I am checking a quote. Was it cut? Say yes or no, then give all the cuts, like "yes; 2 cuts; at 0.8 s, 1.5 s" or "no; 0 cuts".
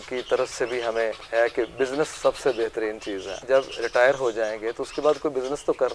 yes; 1 cut; at 3.3 s